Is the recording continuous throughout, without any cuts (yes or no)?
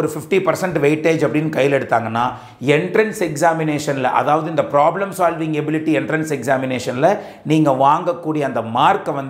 yes